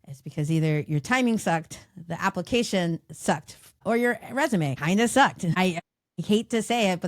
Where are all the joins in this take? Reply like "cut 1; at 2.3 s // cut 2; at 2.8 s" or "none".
cut 1; at 3.8 s // cut 2; at 4.8 s // cut 3; at 5.9 s